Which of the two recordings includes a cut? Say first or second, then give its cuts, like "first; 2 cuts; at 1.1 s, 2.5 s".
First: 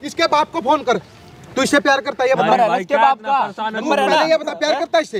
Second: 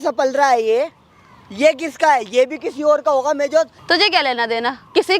second; 1 cut; at 3.8 s